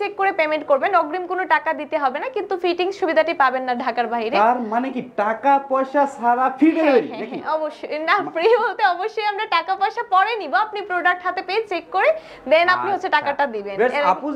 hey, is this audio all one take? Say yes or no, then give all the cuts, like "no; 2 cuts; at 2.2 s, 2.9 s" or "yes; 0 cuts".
yes; 0 cuts